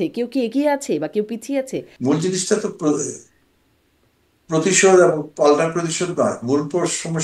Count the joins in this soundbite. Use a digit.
1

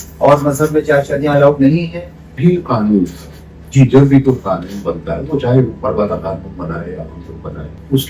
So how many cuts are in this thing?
1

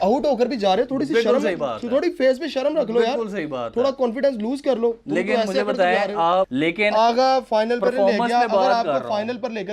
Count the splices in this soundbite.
1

